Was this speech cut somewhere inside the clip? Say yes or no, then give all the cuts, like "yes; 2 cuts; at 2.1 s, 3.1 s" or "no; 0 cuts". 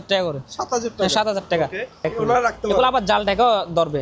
yes; 1 cut; at 2.1 s